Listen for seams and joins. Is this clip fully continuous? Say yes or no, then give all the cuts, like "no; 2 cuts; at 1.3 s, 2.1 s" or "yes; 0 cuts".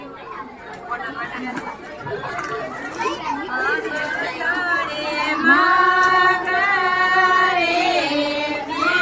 yes; 0 cuts